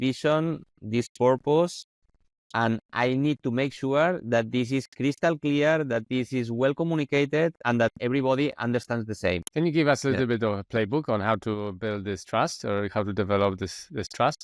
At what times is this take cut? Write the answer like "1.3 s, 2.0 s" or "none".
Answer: 9.4 s